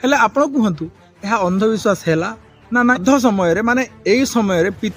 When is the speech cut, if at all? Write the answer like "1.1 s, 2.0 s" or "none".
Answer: 3.0 s